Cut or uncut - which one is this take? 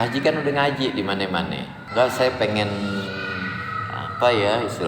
cut